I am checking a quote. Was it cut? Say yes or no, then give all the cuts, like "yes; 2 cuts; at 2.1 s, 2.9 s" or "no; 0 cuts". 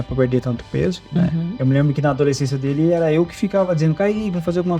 no; 0 cuts